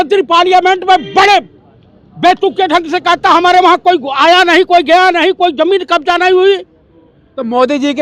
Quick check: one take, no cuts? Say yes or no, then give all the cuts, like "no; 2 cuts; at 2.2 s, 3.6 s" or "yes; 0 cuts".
yes; 0 cuts